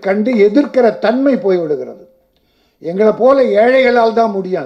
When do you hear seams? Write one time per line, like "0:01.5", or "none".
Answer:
none